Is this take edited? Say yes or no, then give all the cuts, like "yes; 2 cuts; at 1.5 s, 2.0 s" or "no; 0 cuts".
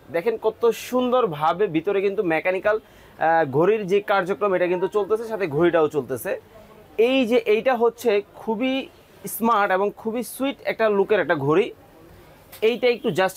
no; 0 cuts